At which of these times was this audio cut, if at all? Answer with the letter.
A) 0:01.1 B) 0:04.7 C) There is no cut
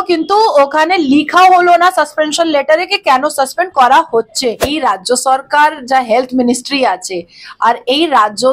B